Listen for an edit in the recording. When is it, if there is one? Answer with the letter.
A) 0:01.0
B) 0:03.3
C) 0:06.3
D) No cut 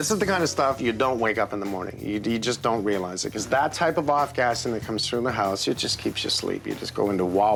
D